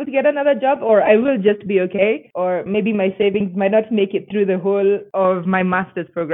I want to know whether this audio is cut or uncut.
uncut